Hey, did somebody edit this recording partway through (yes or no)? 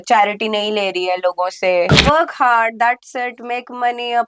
yes